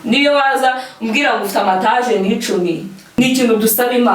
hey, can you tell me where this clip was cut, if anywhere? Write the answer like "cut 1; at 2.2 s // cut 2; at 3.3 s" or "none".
cut 1; at 3.2 s